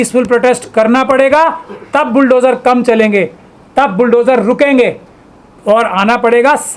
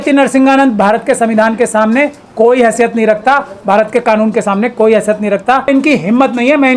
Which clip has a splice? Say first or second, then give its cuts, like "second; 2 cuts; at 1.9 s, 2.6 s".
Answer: second; 1 cut; at 5.7 s